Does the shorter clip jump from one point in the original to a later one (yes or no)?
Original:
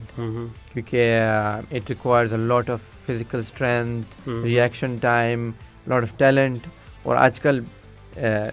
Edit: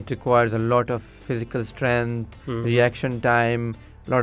no